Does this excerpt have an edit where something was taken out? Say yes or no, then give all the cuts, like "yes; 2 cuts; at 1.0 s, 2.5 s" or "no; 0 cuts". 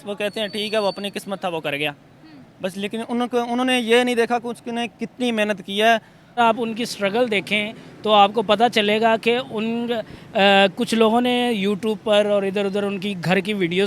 yes; 1 cut; at 6.4 s